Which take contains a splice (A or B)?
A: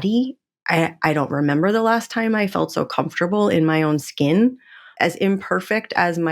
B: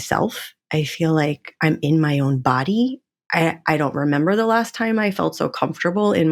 A